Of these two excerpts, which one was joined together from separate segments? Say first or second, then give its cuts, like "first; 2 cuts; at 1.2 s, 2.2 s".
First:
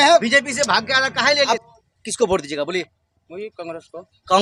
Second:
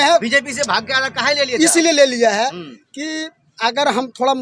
first; 1 cut; at 1.5 s